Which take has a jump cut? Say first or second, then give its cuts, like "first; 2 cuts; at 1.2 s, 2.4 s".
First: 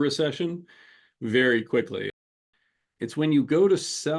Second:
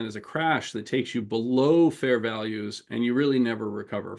first; 1 cut; at 2.1 s